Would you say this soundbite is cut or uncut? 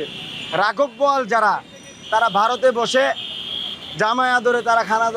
uncut